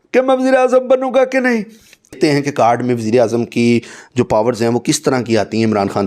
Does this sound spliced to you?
yes; 1 cut; at 2.2 s

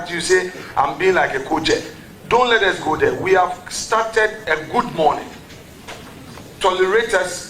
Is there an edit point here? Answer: no; 0 cuts

